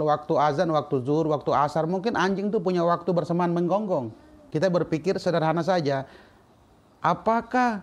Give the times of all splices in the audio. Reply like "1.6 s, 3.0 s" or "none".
4.4 s